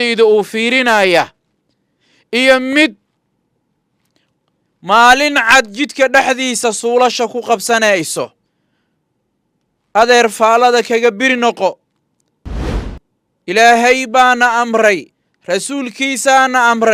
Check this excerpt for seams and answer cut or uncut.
uncut